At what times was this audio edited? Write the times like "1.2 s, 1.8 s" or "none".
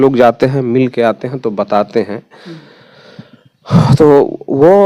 none